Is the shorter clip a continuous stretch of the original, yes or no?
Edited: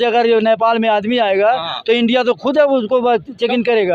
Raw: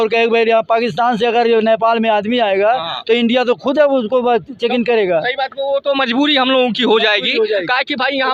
yes